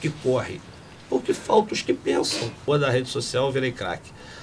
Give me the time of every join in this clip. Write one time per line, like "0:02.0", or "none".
0:02.6